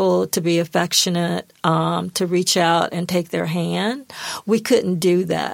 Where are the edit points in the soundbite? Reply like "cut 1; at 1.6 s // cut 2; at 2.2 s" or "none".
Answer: none